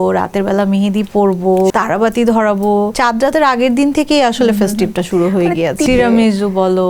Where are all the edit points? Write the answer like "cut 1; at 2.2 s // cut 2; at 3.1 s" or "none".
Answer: cut 1; at 1.7 s // cut 2; at 2.9 s // cut 3; at 5.8 s